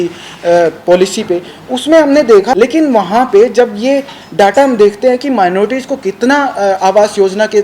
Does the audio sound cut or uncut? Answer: cut